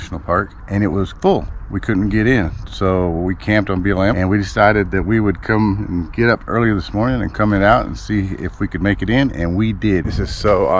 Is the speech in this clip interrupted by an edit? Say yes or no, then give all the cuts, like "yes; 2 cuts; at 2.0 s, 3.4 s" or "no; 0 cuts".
yes; 3 cuts; at 0.9 s, 4.1 s, 10.1 s